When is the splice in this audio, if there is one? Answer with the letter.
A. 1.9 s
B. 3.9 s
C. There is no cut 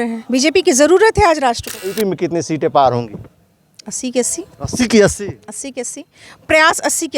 A